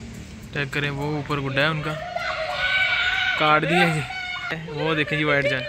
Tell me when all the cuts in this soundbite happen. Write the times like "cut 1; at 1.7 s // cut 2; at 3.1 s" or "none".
cut 1; at 4.6 s